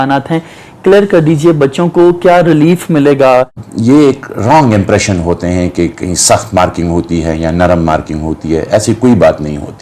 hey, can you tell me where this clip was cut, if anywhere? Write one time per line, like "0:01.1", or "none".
0:03.7